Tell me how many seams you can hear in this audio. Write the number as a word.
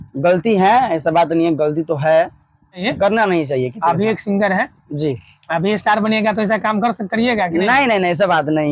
one